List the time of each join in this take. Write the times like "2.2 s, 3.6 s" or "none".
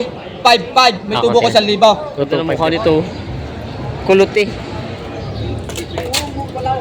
2.3 s